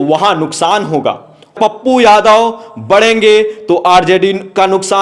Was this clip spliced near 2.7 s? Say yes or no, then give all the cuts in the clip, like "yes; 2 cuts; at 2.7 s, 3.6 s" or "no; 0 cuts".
no; 1 cut; at 1.5 s